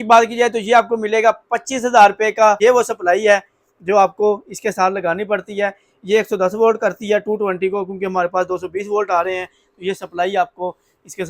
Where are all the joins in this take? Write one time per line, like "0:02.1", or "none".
0:02.6